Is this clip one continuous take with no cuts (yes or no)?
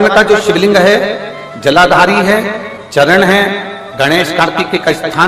yes